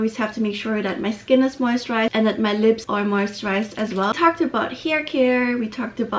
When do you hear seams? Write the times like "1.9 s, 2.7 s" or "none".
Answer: 2.8 s, 4.1 s